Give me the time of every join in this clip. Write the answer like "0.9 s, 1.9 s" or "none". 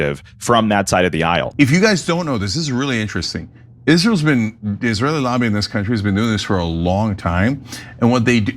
1.5 s